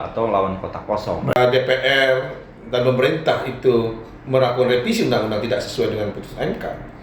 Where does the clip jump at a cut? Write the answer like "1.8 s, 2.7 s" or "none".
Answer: 1.4 s